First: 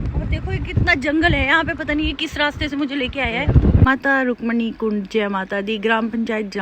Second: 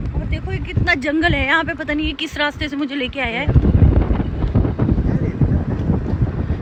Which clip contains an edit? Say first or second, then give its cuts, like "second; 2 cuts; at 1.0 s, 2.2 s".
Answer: first; 1 cut; at 3.9 s